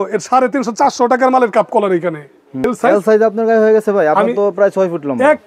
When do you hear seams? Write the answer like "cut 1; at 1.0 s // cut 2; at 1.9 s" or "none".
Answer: cut 1; at 2.7 s